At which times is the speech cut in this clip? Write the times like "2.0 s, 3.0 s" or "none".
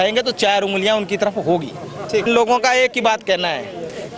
2.3 s